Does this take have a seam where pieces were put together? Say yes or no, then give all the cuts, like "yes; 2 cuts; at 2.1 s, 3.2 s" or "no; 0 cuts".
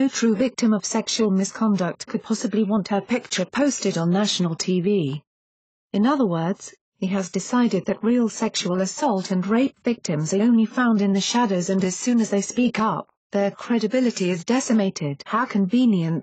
no; 0 cuts